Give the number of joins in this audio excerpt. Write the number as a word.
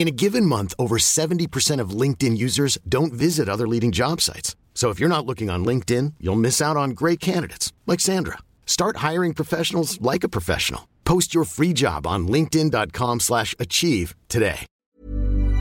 one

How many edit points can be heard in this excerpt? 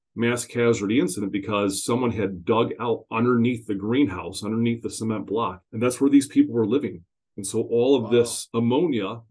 one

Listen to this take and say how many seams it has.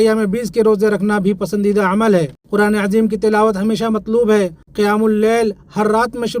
two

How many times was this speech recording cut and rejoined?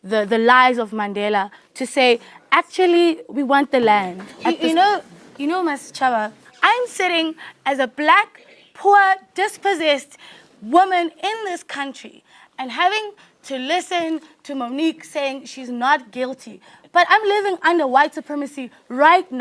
one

